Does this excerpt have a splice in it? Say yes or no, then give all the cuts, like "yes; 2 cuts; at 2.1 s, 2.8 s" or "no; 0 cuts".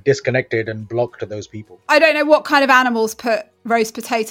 yes; 1 cut; at 1.9 s